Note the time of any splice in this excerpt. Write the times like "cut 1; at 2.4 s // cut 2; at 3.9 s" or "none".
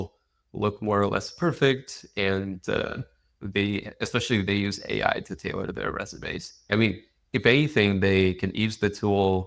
cut 1; at 6.7 s